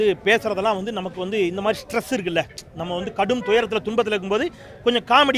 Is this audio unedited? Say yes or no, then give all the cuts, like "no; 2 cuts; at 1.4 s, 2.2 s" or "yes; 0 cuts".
yes; 0 cuts